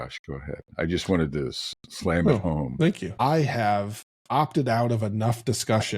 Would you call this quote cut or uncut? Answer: cut